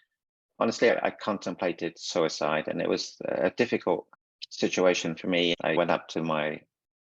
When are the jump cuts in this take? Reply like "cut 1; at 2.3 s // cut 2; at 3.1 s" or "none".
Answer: cut 1; at 5.6 s